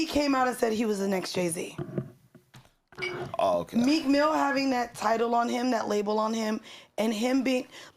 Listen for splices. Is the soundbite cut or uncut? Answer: cut